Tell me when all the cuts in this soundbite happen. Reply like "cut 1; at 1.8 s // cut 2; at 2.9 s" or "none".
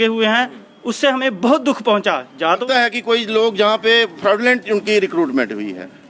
cut 1; at 2.6 s